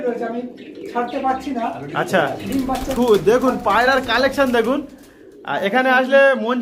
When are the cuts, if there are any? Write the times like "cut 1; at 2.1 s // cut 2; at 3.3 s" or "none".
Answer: cut 1; at 2.9 s